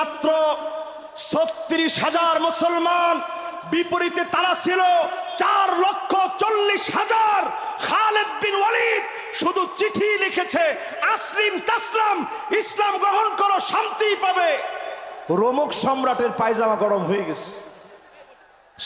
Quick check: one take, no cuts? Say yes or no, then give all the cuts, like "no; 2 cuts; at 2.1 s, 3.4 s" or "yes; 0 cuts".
yes; 0 cuts